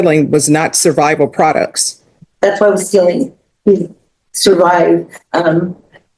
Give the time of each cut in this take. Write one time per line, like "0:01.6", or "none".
0:02.1

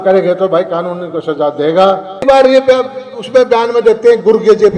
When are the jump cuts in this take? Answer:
0:02.2

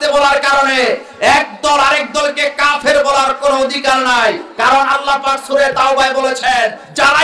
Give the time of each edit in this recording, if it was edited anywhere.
none

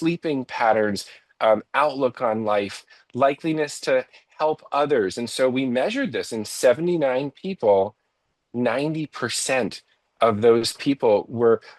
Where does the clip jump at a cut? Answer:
none

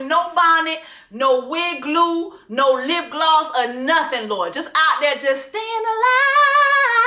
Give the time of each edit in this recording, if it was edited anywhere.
none

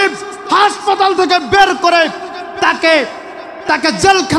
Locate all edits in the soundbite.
none

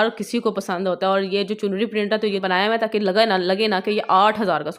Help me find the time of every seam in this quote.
0:02.6

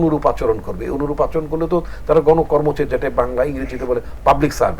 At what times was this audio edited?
none

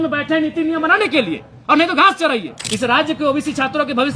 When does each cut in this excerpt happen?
0:02.6

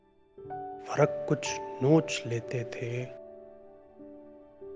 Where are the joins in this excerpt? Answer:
0:03.1

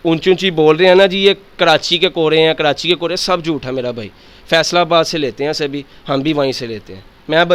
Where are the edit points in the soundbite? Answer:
none

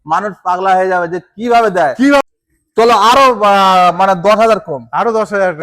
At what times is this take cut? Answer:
0:02.2

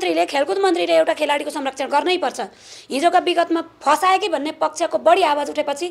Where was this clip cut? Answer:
none

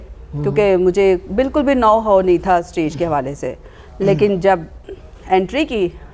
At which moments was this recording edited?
none

